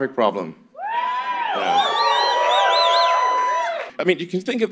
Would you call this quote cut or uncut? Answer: cut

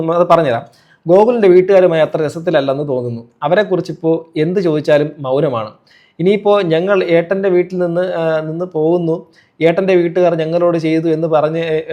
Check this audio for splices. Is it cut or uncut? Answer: uncut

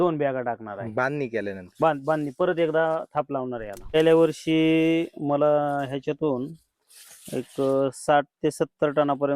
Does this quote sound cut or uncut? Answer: cut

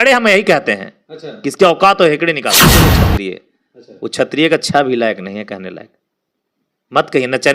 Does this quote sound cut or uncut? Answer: cut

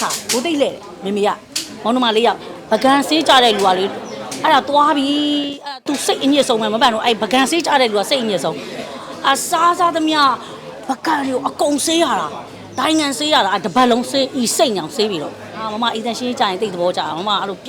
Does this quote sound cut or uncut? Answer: cut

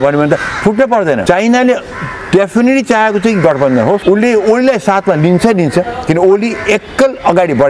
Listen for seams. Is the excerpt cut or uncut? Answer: cut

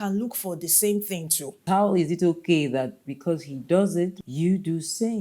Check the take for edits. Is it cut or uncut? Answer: cut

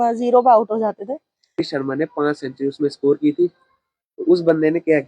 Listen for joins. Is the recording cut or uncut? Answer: cut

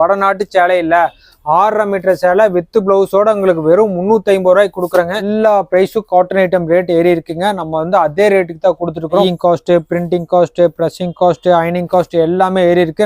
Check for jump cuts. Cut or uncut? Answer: cut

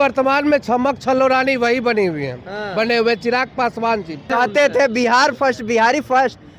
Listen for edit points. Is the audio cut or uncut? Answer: cut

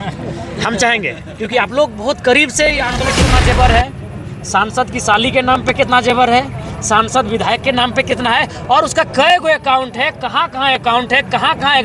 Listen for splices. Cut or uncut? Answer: cut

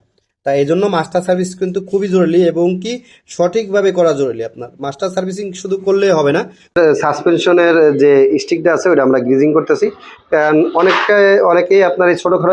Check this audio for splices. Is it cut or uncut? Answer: cut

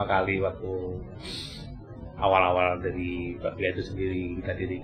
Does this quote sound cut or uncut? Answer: uncut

